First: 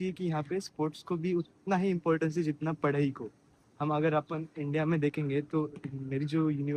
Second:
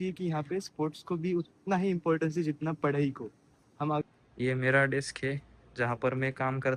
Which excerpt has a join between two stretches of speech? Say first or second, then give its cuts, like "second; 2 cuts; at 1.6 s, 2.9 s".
second; 1 cut; at 4.0 s